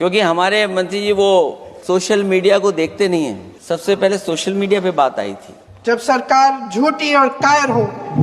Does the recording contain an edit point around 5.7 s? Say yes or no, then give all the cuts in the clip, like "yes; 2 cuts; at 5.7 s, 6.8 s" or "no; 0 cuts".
yes; 3 cuts; at 1.7 s, 3.5 s, 5.7 s